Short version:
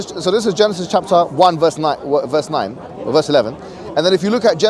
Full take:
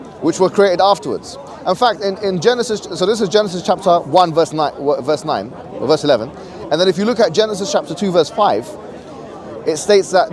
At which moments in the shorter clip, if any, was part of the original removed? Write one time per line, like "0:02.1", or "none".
none